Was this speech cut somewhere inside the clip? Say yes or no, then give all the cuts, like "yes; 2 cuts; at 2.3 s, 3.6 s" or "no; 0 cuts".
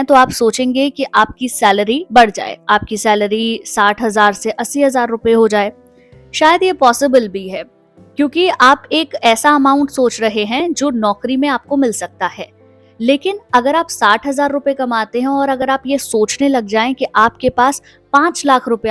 no; 0 cuts